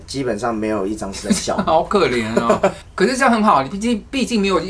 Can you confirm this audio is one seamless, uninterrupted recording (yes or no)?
yes